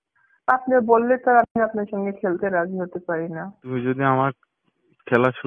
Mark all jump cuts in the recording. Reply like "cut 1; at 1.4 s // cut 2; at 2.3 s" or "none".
cut 1; at 3.6 s